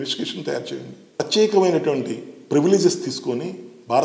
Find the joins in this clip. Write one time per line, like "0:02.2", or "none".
0:01.1